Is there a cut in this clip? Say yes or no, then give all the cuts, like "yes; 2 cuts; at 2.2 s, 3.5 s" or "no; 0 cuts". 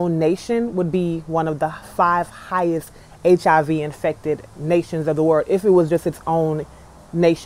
no; 0 cuts